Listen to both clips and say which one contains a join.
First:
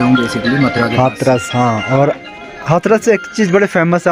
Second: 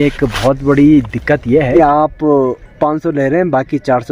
second; 1 cut; at 1.8 s

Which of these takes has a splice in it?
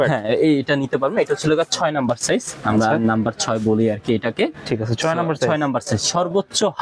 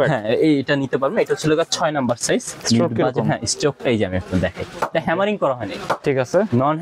second; 1 cut; at 2.5 s

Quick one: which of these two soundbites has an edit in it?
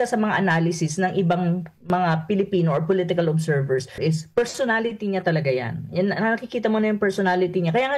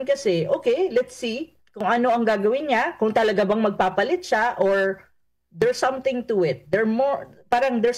first; 1 cut; at 4.0 s

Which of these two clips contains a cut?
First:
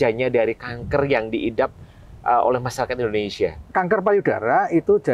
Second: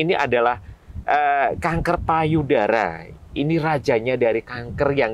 first; 1 cut; at 3.7 s

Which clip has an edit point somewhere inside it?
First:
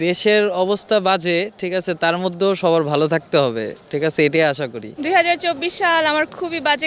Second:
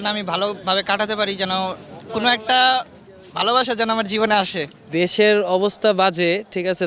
first; 1 cut; at 4.9 s

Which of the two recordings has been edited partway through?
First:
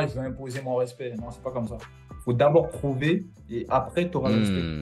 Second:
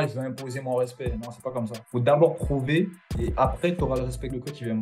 second; 2 cuts; at 1.8 s, 4.0 s

